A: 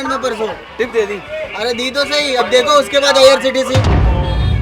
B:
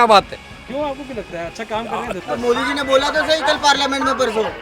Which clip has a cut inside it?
B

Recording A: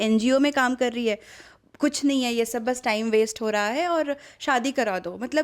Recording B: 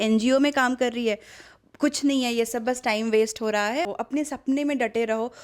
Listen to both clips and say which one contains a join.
B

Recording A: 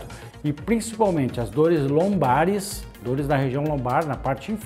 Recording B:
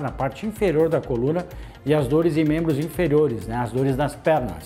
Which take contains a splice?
A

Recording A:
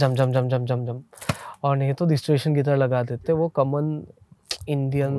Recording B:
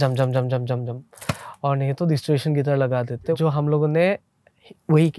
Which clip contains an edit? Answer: B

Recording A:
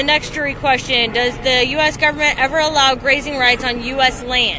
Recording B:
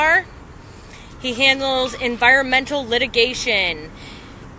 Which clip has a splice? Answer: A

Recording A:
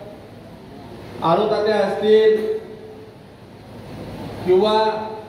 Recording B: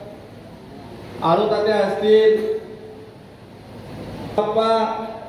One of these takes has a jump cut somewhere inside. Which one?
B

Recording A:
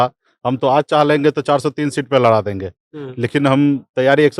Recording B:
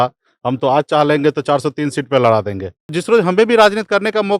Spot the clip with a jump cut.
B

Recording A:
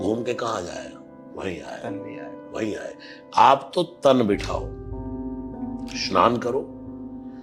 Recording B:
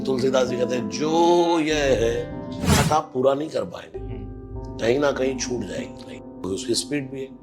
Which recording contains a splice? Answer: B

